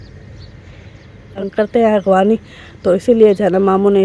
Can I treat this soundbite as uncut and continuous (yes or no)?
no